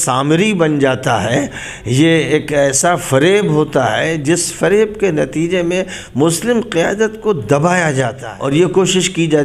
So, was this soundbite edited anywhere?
yes; 1 cut; at 8.2 s

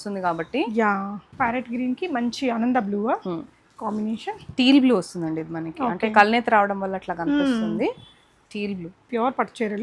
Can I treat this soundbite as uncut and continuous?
no; 2 cuts; at 1.2 s, 9.1 s

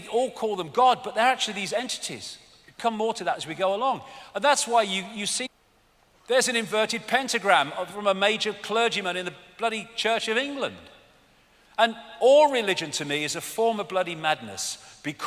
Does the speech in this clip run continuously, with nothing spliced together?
yes; 0 cuts

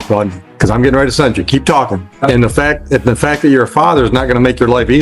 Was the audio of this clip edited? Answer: yes; 1 cut; at 2.1 s

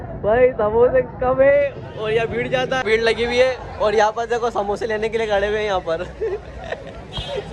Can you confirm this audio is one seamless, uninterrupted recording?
no; 1 cut; at 2.8 s

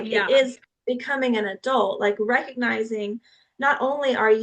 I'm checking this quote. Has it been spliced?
no; 0 cuts

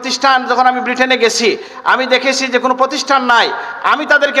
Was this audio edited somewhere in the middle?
no; 0 cuts

